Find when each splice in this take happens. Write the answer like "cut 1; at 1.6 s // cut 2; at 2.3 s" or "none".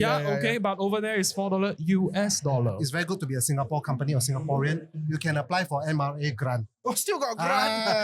cut 1; at 2.8 s